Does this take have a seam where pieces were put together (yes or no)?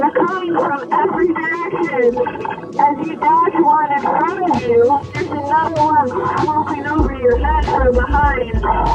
yes